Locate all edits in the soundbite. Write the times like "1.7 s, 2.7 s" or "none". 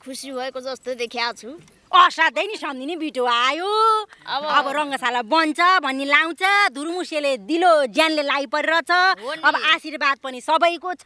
none